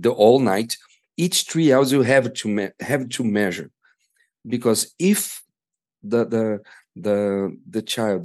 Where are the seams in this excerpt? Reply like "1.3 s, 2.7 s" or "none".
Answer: none

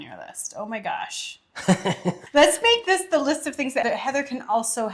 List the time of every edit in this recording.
2.2 s, 3.8 s

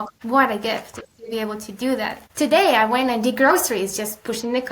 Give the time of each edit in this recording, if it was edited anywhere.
2.2 s

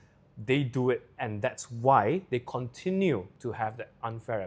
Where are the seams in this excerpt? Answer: 3.4 s

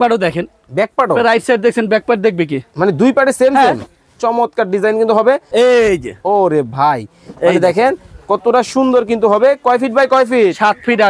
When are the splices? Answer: 5.5 s

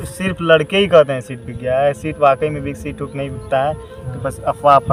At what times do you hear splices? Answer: none

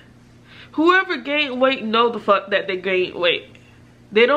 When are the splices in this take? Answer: none

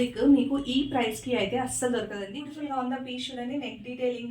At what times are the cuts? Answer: 2.2 s

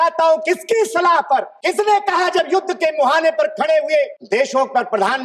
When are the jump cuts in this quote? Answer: 1.5 s, 4.2 s

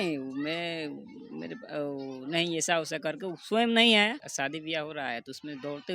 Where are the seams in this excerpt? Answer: 4.3 s

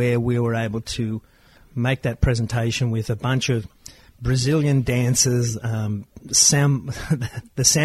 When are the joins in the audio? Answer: 1.6 s

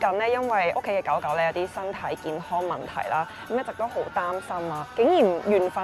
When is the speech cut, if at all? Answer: none

